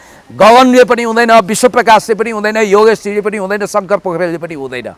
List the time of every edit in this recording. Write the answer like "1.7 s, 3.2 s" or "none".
none